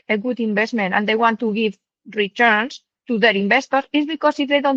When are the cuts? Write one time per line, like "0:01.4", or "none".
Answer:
none